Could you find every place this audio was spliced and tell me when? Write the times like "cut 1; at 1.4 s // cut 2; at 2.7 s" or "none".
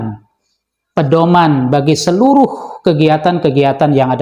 none